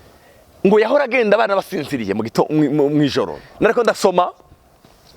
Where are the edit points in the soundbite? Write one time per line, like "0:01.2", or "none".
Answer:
0:03.4